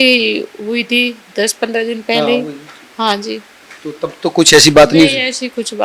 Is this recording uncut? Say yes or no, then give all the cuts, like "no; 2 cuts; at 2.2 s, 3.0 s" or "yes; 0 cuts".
yes; 0 cuts